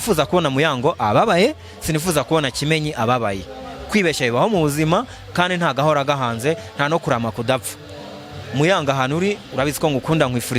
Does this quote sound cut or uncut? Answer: uncut